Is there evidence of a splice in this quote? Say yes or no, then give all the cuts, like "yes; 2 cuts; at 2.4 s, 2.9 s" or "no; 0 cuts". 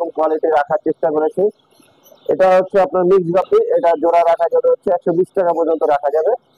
no; 0 cuts